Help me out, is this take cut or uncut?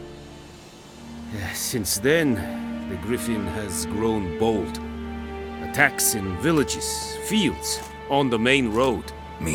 uncut